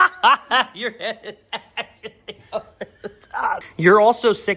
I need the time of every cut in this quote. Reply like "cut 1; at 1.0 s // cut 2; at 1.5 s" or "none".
cut 1; at 3.7 s